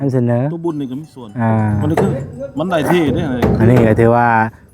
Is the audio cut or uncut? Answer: cut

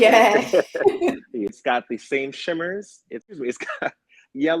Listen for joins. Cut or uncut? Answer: cut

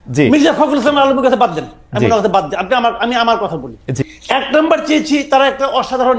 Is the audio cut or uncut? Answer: cut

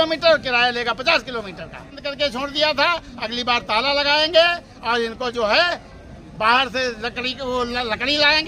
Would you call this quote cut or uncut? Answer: cut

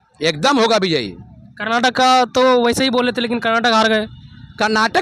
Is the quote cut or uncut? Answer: uncut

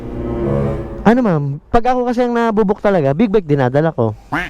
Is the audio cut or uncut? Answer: cut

